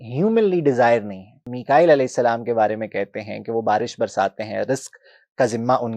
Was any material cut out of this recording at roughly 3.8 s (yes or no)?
no